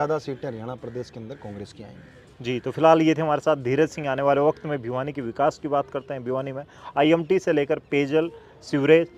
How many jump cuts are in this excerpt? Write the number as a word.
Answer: zero